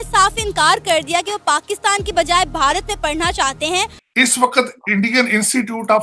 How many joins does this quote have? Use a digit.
1